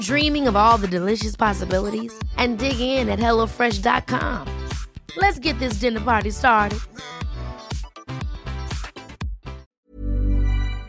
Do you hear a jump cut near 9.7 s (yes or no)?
yes